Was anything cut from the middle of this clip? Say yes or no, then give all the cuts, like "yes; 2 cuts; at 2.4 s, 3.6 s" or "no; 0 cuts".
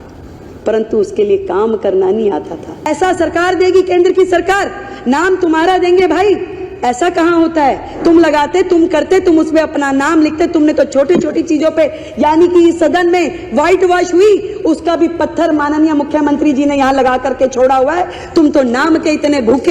yes; 1 cut; at 2.9 s